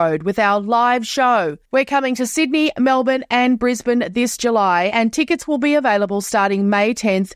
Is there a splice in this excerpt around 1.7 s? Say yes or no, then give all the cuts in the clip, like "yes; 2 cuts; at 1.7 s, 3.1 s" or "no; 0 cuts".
no; 0 cuts